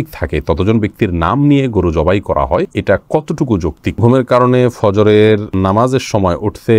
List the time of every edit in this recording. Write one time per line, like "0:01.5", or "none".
0:02.7
0:04.0
0:05.5